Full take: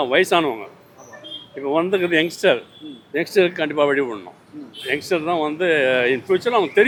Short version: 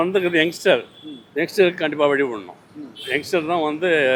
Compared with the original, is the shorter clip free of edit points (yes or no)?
yes